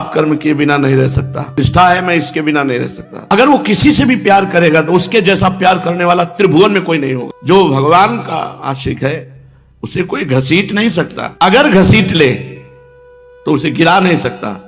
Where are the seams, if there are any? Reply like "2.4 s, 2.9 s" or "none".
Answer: 3.1 s, 7.2 s